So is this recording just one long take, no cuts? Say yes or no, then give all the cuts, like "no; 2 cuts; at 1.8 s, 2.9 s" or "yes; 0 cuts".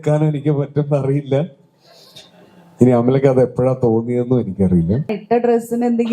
no; 1 cut; at 5.2 s